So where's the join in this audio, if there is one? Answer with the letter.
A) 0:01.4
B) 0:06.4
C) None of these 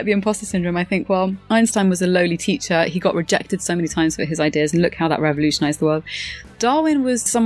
A